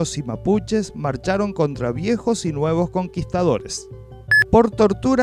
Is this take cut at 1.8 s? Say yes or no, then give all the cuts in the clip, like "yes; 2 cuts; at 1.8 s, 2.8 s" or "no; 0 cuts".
no; 1 cut; at 4.0 s